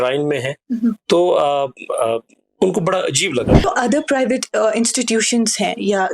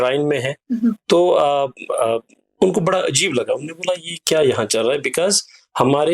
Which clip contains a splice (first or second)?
first